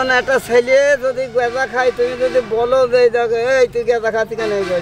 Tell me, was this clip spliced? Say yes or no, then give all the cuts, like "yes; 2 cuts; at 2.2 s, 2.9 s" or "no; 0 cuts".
no; 0 cuts